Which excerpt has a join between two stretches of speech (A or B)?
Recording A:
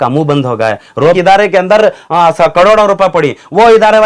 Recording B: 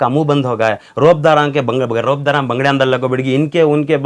A